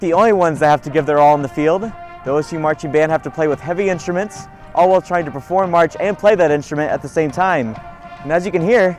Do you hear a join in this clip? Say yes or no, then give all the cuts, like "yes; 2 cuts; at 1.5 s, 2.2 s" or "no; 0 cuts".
no; 0 cuts